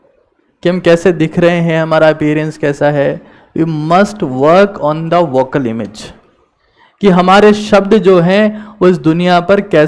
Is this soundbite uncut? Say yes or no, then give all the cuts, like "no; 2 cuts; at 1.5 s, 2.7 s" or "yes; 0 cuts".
yes; 0 cuts